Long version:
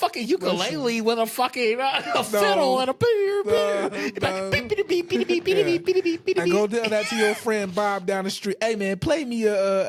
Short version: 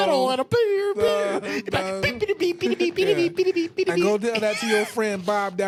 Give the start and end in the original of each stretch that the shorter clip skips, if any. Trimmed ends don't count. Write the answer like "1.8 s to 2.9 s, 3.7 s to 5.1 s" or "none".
none